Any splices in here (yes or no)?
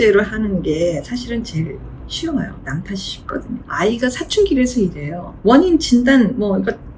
no